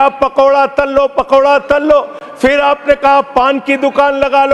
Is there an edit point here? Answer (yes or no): no